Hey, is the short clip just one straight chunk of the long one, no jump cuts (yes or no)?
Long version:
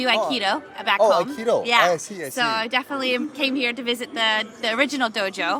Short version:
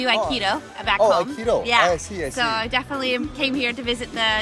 yes